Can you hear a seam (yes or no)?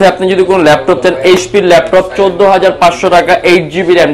no